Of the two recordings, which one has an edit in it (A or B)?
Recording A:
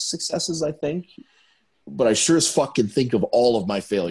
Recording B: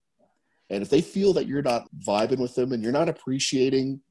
B